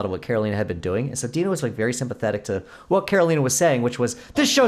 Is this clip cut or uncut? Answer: uncut